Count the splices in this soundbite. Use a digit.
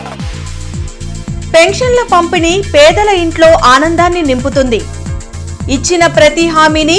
1